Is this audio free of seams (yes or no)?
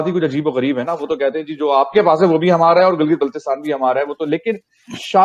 yes